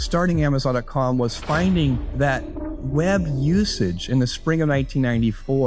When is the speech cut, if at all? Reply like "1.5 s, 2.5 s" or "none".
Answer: none